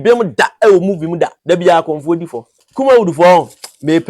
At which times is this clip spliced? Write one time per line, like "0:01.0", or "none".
0:01.4
0:02.6